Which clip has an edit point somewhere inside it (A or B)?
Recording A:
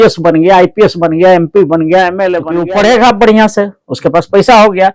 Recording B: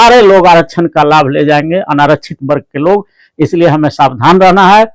A